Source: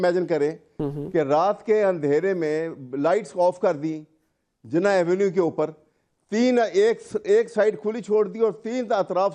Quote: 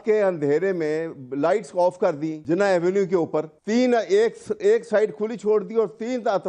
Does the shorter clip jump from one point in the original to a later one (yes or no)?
yes